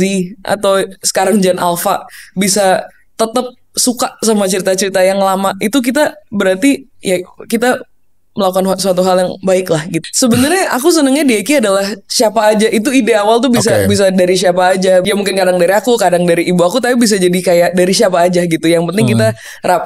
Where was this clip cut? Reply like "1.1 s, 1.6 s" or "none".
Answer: 9.9 s, 15.1 s

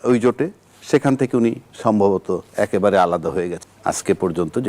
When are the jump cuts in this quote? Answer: 3.7 s

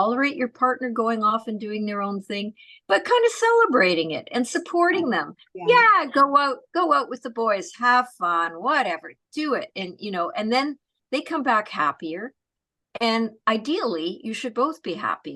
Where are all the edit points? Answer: none

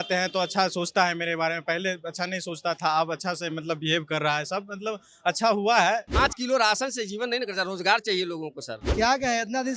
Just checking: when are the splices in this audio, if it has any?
6.1 s, 8.9 s

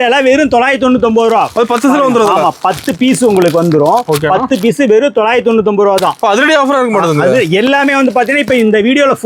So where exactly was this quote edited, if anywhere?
none

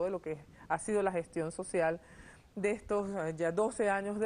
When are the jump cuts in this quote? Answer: none

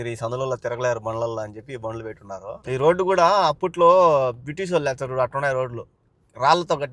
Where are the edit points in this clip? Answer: 2.6 s

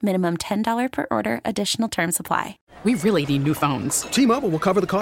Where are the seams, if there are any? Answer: 2.6 s

